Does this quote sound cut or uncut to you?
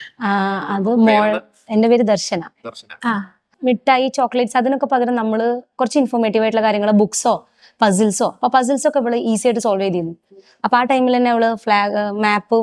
cut